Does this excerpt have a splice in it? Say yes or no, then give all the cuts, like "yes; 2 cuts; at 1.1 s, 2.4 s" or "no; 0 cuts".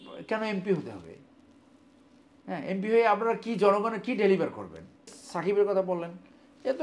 yes; 1 cut; at 5.1 s